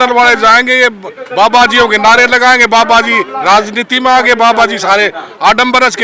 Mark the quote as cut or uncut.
uncut